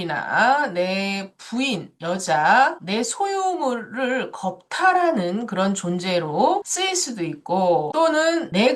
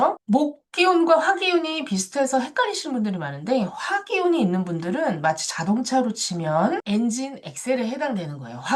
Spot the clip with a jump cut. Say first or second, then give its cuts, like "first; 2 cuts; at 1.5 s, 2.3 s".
second; 1 cut; at 6.8 s